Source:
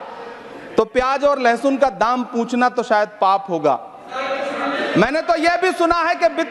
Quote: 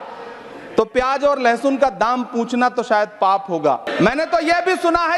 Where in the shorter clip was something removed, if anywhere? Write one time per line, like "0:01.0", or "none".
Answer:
0:03.9